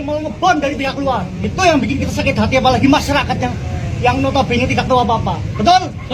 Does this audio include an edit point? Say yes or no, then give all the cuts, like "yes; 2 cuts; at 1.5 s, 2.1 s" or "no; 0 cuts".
no; 0 cuts